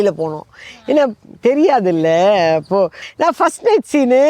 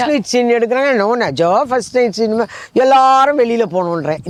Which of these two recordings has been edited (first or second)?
first